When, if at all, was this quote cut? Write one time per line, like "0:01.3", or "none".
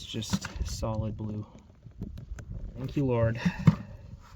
0:02.9

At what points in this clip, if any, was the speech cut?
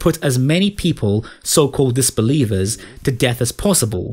none

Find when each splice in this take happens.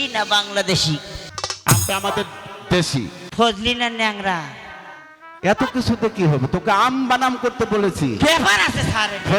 0:01.1
0:03.2

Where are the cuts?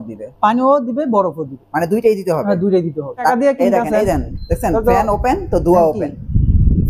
0:03.3

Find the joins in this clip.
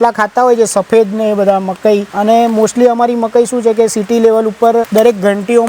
0:02.1
0:04.9

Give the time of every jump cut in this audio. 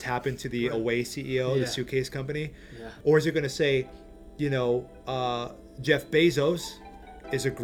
0:02.9

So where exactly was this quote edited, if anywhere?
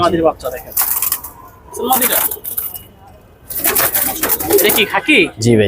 0:04.4

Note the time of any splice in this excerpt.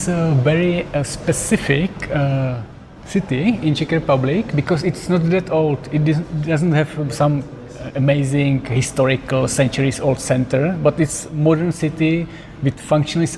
none

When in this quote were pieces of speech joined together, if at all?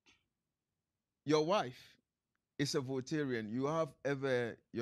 none

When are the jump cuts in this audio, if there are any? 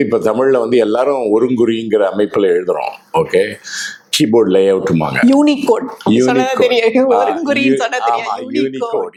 none

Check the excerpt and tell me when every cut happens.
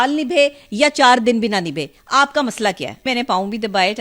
0:03.0

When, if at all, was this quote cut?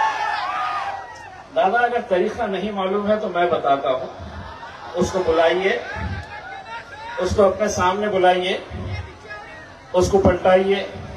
none

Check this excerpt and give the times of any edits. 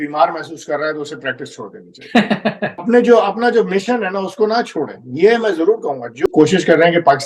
0:02.9
0:06.2

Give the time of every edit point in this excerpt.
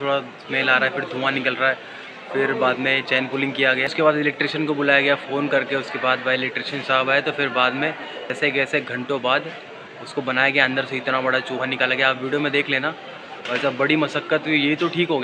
0:03.9
0:08.3

